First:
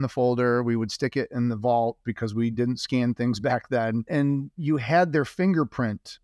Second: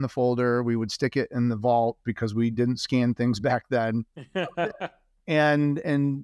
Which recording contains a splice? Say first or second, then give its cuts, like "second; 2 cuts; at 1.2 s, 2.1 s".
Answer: first; 1 cut; at 4.1 s